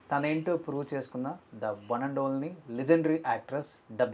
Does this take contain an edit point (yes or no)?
no